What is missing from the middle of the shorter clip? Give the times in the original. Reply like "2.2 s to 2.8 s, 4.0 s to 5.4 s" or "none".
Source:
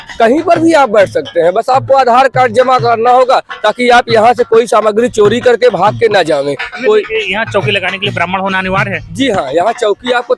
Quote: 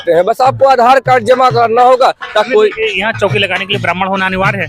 3.8 s to 6.8 s